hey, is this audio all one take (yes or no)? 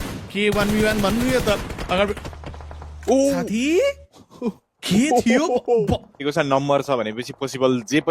no